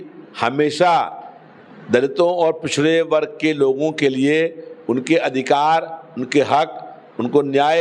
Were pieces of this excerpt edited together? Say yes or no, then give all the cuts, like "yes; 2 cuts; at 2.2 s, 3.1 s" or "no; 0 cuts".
no; 0 cuts